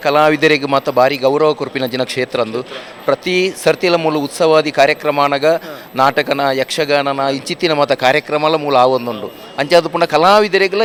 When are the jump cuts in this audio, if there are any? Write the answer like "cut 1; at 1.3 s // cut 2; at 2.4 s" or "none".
none